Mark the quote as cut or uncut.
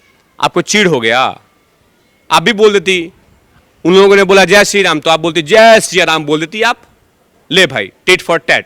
uncut